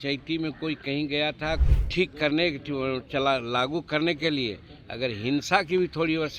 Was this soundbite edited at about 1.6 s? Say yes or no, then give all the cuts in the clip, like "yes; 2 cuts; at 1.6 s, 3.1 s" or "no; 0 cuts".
yes; 1 cut; at 1.6 s